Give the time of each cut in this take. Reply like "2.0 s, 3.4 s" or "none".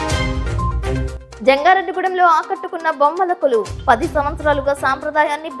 1.1 s